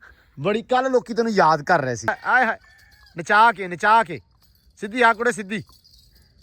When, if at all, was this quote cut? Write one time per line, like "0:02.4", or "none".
0:02.1